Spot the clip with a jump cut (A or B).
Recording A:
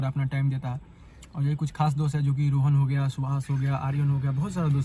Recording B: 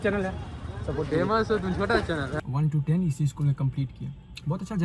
B